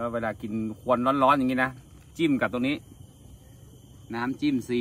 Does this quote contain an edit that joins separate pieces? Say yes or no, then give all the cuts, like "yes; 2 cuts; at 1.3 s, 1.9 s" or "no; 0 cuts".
no; 0 cuts